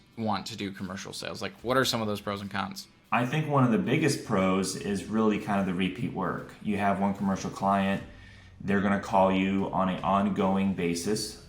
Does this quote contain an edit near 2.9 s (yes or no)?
yes